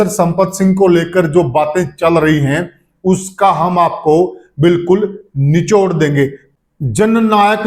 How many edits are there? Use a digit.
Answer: 1